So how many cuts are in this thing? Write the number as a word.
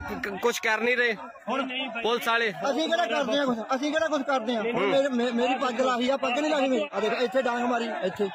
one